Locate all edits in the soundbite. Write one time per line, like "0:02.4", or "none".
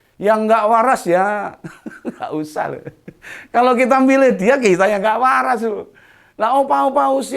none